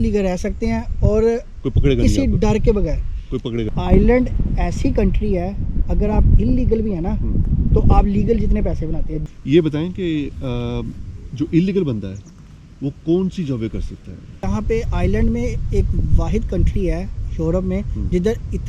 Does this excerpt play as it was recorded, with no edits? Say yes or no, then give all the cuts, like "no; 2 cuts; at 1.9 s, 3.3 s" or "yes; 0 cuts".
no; 3 cuts; at 3.8 s, 9.1 s, 14.5 s